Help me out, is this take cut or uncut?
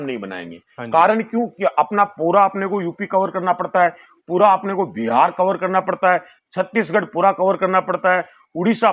uncut